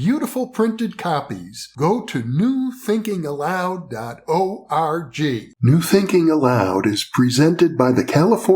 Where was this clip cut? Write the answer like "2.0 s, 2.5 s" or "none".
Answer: 5.5 s